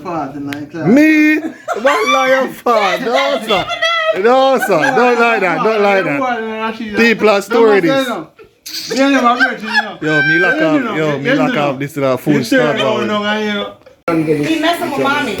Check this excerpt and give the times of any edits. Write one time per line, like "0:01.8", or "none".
0:14.0